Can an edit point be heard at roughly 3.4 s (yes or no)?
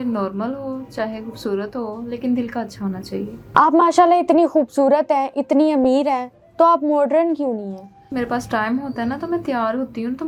no